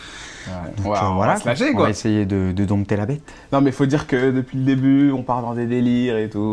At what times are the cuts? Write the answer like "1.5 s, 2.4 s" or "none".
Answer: 2.5 s